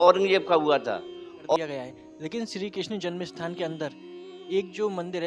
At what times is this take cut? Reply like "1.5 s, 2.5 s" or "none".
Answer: 1.4 s